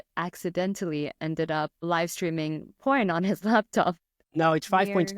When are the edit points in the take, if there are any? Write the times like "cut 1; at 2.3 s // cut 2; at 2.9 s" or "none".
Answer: cut 1; at 4.2 s